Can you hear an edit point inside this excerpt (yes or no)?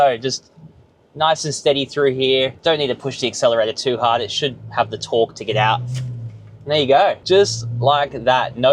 yes